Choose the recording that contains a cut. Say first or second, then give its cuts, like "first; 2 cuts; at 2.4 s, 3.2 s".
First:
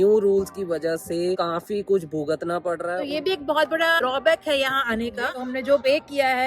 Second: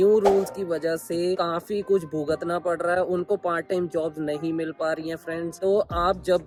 first; 2 cuts; at 3.0 s, 5.2 s